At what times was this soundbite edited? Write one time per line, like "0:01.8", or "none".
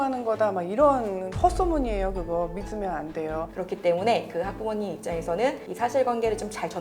0:03.5
0:05.7